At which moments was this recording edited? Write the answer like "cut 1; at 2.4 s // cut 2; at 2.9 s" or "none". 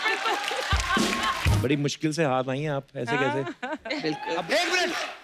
cut 1; at 1.6 s // cut 2; at 4.4 s